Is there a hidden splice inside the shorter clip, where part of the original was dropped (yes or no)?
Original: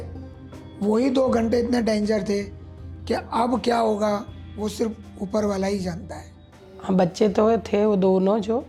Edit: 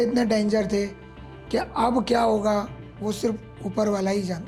no